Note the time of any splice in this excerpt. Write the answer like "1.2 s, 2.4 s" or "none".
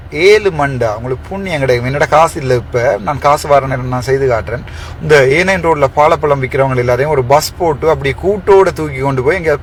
none